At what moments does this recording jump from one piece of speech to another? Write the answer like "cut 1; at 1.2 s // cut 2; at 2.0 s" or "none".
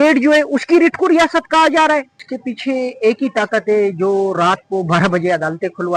cut 1; at 2.2 s